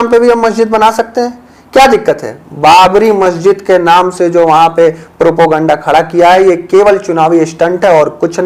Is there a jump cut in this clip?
no; 0 cuts

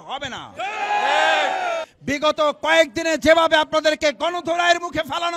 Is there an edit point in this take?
yes; 1 cut; at 1.9 s

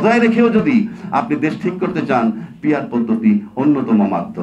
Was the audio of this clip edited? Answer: no; 0 cuts

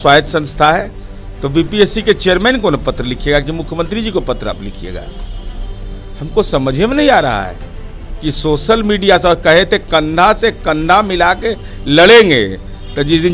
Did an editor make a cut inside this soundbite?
no; 0 cuts

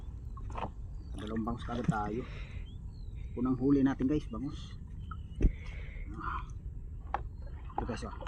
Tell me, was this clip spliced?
no; 0 cuts

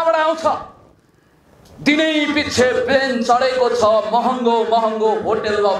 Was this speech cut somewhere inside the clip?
no; 0 cuts

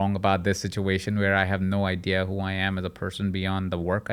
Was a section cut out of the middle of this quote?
no; 0 cuts

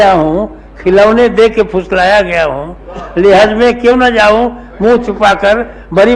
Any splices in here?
no; 0 cuts

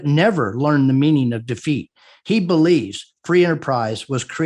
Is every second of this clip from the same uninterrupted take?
yes; 0 cuts

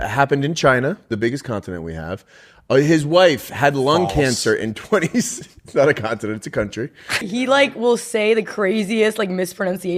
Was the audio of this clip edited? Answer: yes; 1 cut; at 7.3 s

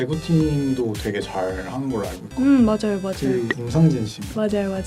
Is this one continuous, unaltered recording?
yes; 0 cuts

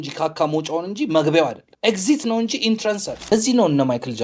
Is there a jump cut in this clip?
yes; 2 cuts; at 1.7 s, 3.3 s

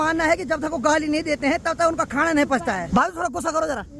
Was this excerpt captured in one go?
no; 1 cut; at 2.8 s

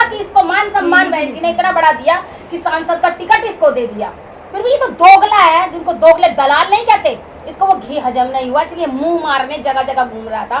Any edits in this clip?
no; 0 cuts

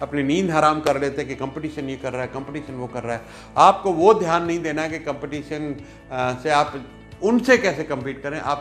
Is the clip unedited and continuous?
yes; 0 cuts

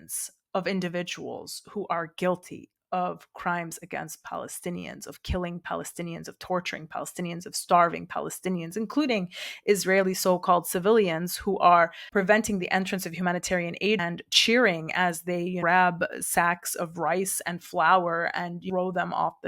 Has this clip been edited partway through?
yes; 3 cuts; at 14.0 s, 15.6 s, 18.6 s

